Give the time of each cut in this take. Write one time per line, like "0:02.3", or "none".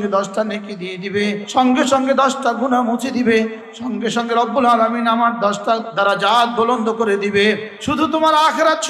0:01.4
0:03.6
0:07.7